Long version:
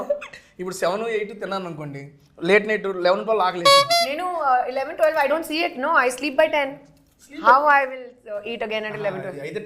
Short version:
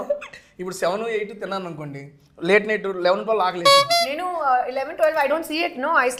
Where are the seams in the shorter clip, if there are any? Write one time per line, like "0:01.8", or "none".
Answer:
none